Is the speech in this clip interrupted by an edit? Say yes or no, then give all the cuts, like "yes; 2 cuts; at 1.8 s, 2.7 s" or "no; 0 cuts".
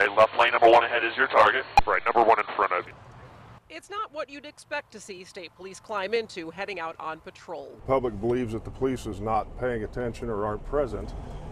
yes; 2 cuts; at 2.8 s, 7.8 s